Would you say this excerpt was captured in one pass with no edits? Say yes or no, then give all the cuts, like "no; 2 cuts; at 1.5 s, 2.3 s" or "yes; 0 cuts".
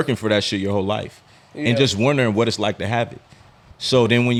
yes; 0 cuts